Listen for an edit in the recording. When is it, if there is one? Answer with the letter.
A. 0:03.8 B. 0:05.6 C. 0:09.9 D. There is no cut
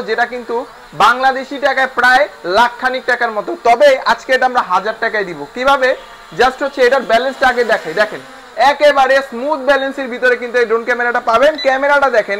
D